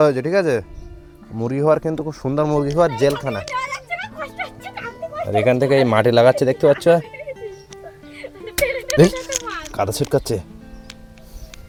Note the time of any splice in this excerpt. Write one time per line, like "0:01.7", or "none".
none